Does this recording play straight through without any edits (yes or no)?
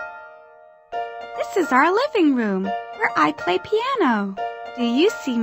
no